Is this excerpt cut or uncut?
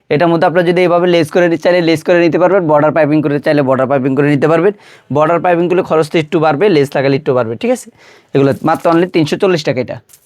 uncut